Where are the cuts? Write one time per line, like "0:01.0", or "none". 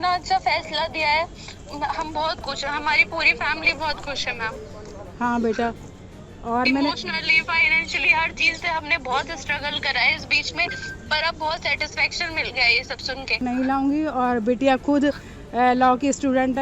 0:13.4